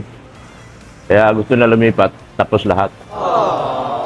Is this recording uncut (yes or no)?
no